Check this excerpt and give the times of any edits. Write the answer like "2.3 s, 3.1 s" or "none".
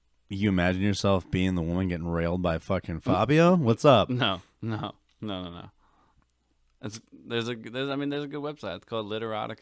none